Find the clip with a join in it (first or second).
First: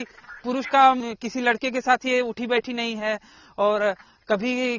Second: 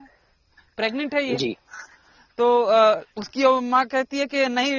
first